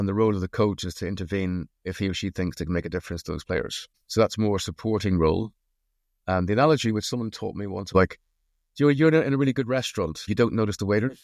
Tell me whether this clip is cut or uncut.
cut